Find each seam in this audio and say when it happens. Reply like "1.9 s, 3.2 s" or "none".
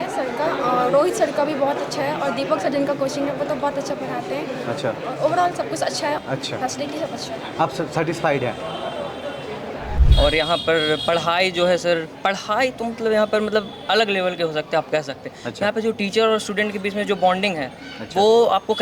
6.2 s, 10.0 s